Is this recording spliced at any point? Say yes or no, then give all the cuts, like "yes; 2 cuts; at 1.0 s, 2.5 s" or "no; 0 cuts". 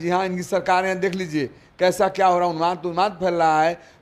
no; 0 cuts